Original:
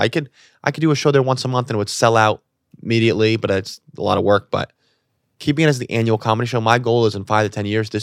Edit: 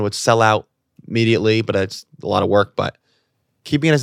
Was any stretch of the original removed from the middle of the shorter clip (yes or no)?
no